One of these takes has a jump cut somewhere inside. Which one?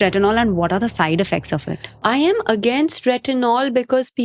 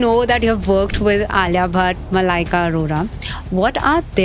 first; 1 cut; at 2.0 s

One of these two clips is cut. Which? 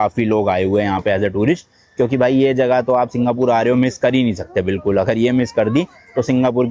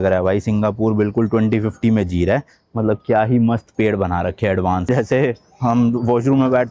second; 1 cut; at 4.9 s

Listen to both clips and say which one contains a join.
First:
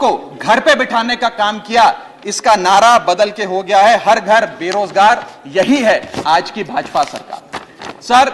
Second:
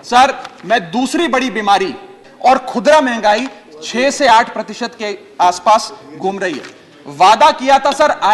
second; 1 cut; at 2.2 s

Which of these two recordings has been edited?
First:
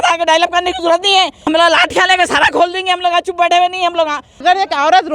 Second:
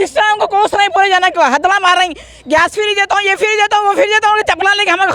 first; 2 cuts; at 1.4 s, 4.4 s

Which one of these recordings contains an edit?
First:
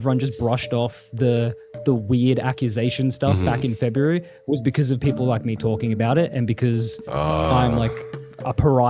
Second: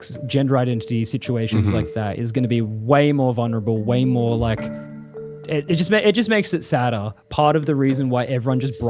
second; 1 cut; at 7.2 s

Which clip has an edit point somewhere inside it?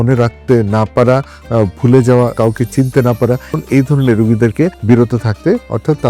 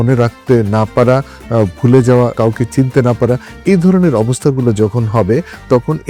first; 2 cuts; at 3.5 s, 4.8 s

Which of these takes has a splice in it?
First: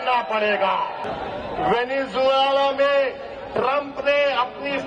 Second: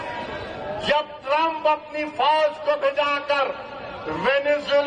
first; 1 cut; at 1.0 s

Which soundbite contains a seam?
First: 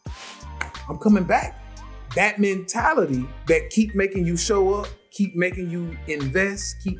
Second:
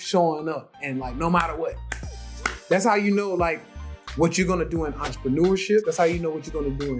first; 2 cuts; at 2.0 s, 3.3 s

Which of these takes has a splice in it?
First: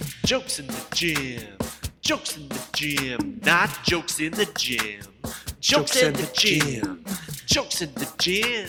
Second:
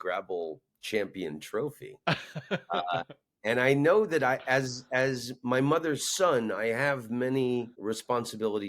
second; 1 cut; at 7.7 s

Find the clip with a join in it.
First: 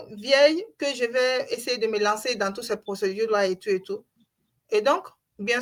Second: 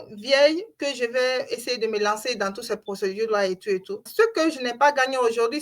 second; 1 cut; at 4.1 s

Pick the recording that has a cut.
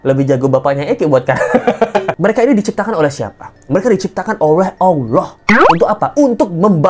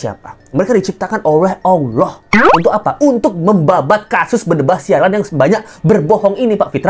first; 1 cut; at 2.1 s

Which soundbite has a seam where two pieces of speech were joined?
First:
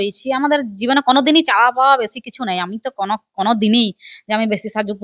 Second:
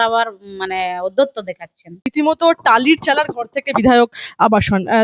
second; 1 cut; at 2.1 s

